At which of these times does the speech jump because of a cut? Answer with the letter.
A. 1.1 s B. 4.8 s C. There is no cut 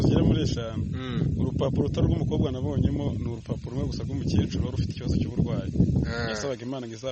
C